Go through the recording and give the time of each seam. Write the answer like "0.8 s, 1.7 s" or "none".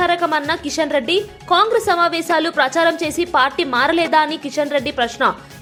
none